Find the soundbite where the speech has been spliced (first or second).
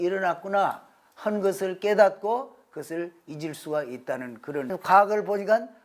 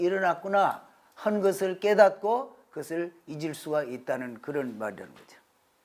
first